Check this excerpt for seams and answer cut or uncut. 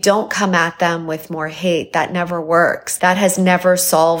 cut